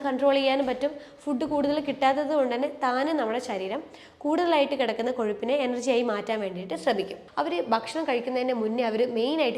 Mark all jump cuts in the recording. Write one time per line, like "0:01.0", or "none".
0:07.2